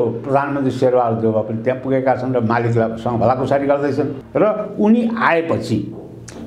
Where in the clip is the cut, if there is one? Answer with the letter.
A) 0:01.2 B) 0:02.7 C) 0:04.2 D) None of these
C